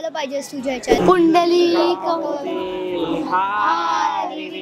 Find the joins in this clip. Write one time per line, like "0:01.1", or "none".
0:00.9